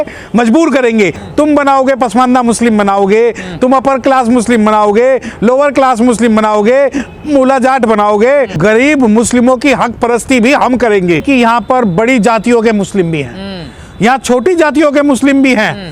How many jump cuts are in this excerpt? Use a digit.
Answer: 3